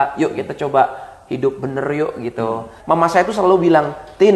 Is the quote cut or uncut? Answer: cut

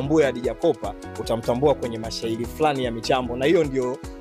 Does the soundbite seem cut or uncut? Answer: uncut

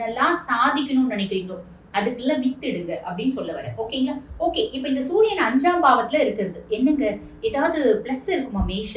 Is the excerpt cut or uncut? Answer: uncut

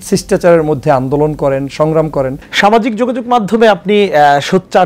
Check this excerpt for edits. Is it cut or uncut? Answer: cut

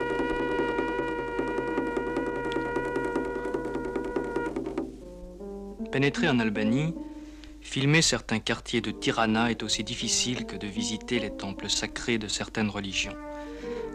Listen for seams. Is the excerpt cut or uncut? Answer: uncut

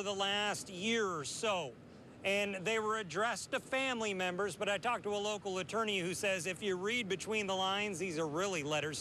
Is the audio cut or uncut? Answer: cut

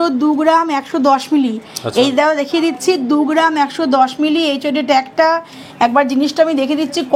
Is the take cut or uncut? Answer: uncut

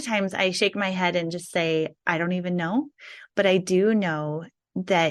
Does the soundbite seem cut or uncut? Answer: uncut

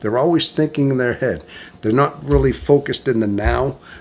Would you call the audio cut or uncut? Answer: uncut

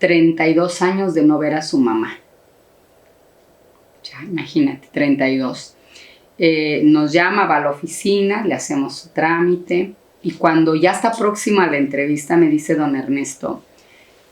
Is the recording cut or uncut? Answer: uncut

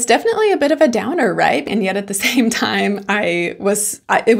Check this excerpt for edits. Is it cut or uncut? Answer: cut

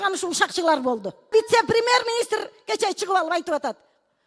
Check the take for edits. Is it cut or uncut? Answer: cut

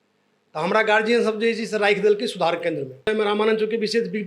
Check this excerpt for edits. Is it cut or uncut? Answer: cut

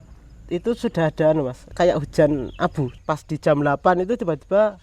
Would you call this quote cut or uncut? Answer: cut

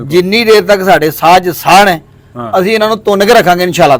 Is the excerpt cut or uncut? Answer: uncut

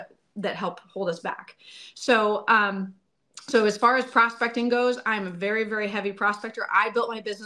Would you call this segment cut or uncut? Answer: uncut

